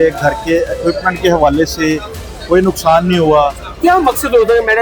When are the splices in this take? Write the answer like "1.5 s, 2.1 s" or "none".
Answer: 3.6 s

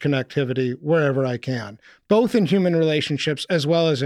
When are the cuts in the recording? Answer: none

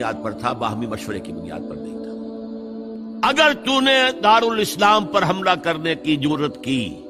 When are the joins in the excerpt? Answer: 1.4 s, 3.2 s

